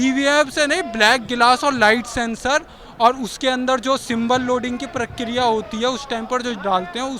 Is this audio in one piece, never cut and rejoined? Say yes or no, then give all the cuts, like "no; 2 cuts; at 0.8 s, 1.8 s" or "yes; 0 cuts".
yes; 0 cuts